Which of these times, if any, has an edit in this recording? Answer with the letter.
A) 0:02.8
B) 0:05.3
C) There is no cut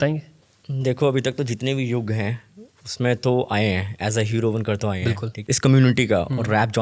B